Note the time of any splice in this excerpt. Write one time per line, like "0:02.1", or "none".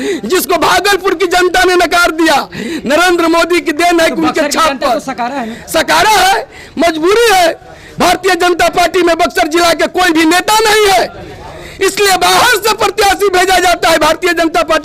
none